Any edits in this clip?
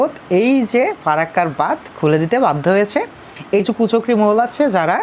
yes; 1 cut; at 3.6 s

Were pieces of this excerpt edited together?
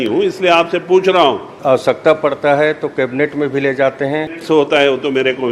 yes; 2 cuts; at 1.5 s, 4.3 s

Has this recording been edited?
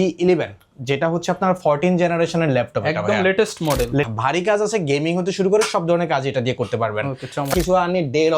yes; 2 cuts; at 4.1 s, 7.5 s

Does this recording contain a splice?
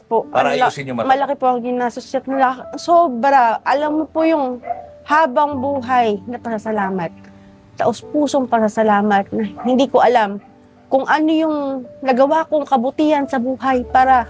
no; 0 cuts

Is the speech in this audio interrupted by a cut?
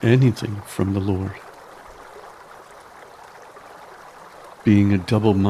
yes; 2 cuts; at 1.3 s, 4.6 s

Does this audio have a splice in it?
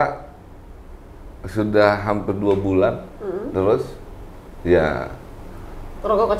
no; 0 cuts

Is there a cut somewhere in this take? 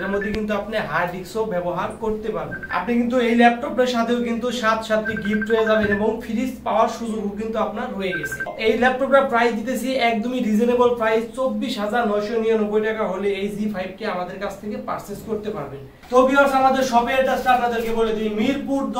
no; 0 cuts

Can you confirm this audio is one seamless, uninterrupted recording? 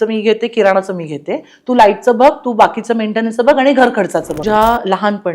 no; 1 cut; at 4.4 s

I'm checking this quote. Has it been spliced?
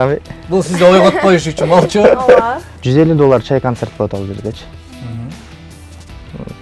yes; 1 cut; at 2.7 s

